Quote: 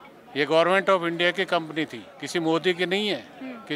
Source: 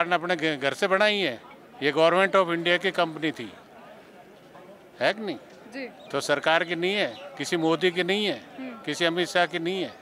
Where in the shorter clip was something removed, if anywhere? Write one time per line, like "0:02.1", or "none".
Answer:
0:02.1